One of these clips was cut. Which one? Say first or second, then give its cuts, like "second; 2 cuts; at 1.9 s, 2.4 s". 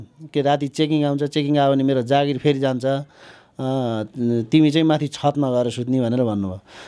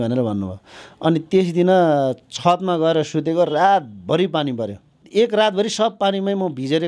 second; 1 cut; at 5.0 s